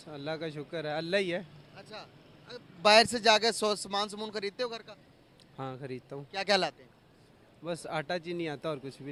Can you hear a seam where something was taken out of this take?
no; 0 cuts

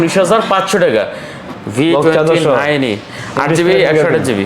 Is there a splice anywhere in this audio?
yes; 1 cut; at 1.5 s

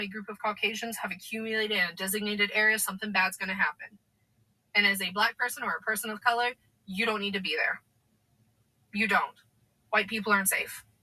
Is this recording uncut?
yes; 0 cuts

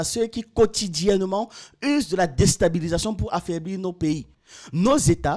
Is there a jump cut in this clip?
yes; 1 cut; at 4.3 s

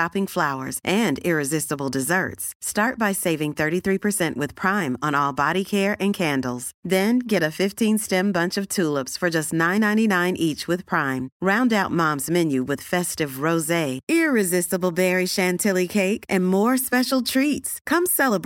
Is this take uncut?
yes; 0 cuts

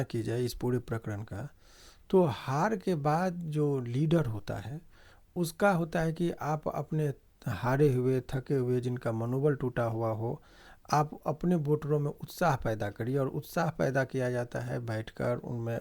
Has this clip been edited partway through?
no; 0 cuts

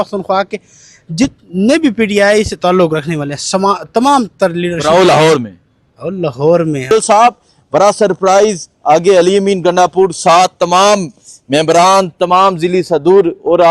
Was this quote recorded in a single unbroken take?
no; 1 cut; at 6.9 s

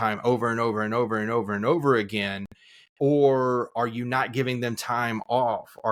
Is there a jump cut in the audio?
no; 0 cuts

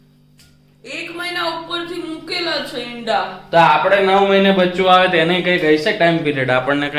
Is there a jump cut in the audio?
no; 0 cuts

